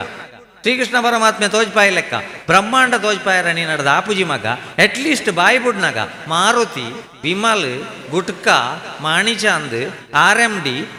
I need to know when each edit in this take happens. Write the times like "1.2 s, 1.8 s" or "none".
none

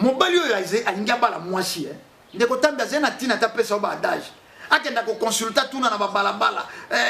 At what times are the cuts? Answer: none

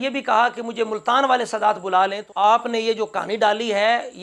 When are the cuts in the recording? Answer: 2.2 s

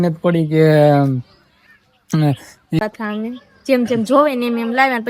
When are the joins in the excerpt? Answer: 2.8 s

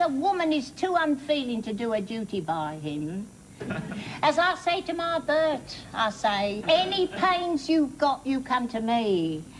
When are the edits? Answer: 1.2 s

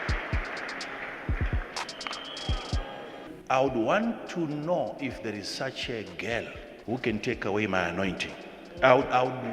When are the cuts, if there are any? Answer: 3.3 s, 6.7 s

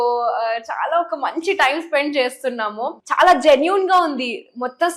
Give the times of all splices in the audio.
3.0 s

